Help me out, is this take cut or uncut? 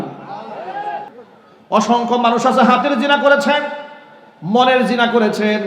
cut